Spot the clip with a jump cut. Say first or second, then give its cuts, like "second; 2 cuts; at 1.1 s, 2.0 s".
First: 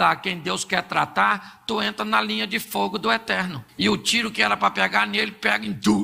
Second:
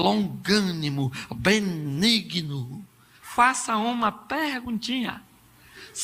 first; 1 cut; at 3.6 s